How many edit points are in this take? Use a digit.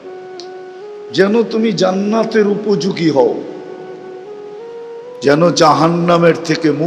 1